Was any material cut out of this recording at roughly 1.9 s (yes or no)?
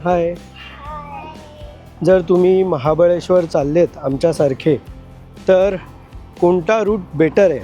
yes